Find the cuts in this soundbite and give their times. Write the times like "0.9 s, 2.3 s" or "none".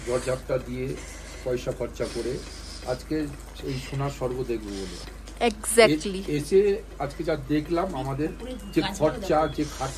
none